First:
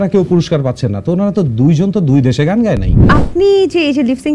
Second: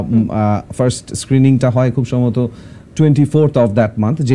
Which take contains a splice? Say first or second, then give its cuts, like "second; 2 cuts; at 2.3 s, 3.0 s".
first; 1 cut; at 3.0 s